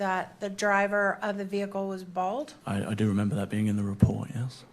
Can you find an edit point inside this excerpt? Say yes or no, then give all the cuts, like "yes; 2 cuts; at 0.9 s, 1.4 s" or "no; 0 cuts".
yes; 2 cuts; at 2.6 s, 3.5 s